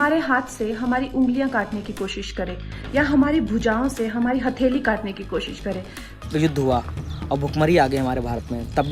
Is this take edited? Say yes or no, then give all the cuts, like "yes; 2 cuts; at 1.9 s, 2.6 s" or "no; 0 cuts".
yes; 1 cut; at 6.1 s